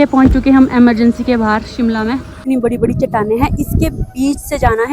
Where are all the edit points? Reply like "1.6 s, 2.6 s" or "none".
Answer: 2.4 s